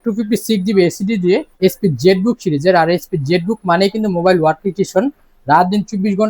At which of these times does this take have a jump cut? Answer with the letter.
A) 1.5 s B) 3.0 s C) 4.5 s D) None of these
A